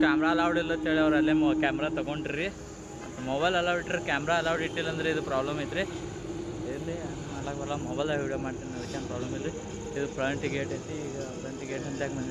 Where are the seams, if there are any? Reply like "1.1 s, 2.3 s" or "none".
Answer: none